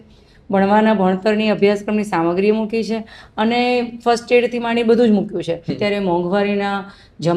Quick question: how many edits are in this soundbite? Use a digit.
1